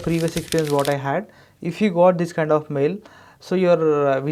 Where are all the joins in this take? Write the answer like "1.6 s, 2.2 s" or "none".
none